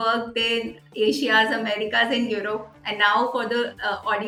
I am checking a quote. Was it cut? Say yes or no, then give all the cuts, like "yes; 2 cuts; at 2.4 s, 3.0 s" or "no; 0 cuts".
no; 0 cuts